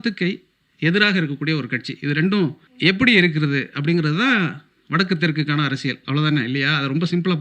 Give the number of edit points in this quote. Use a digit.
1